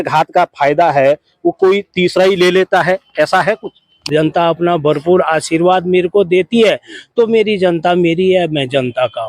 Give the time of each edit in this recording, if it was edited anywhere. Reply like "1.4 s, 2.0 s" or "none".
4.0 s